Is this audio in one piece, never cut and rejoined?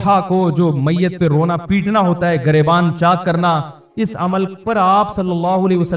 yes; 0 cuts

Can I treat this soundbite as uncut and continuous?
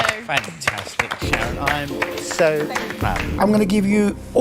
no; 1 cut; at 3.3 s

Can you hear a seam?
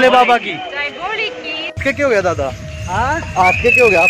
yes; 1 cut; at 1.8 s

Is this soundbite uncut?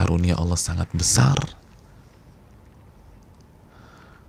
yes; 0 cuts

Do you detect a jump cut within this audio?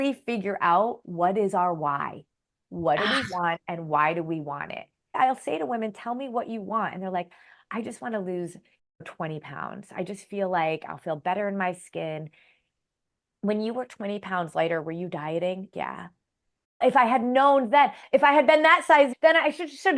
yes; 5 cuts; at 5.1 s, 12.7 s, 15.7 s, 18.0 s, 19.1 s

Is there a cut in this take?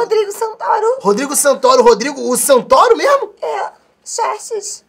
no; 0 cuts

